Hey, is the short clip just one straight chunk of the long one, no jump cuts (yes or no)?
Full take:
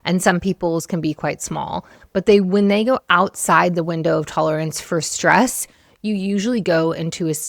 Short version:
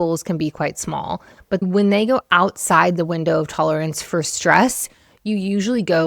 no